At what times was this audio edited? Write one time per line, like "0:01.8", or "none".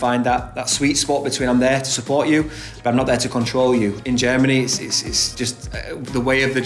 0:04.0
0:05.4